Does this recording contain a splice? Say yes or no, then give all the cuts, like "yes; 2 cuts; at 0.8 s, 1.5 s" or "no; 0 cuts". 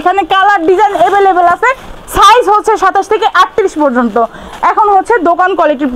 no; 0 cuts